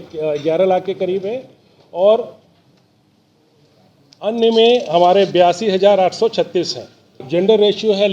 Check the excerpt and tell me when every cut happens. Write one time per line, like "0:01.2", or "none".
0:07.2